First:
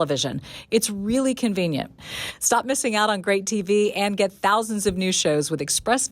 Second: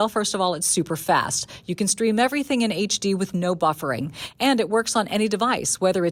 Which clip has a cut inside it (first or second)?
first